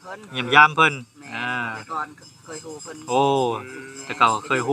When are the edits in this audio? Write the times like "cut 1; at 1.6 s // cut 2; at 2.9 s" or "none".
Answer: none